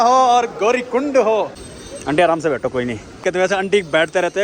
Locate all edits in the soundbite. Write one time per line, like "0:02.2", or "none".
0:01.6
0:03.2